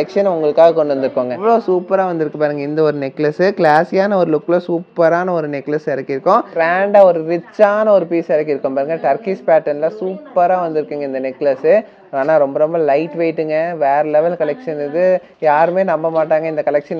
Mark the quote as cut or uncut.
cut